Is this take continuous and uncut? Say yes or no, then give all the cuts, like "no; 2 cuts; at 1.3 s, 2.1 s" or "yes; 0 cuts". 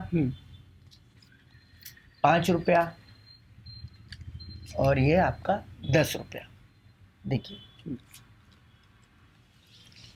yes; 0 cuts